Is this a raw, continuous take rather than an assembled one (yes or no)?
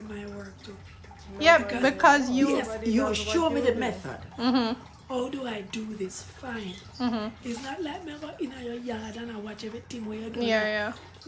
yes